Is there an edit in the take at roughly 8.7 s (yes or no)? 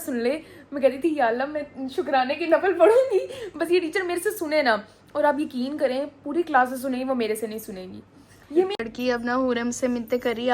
yes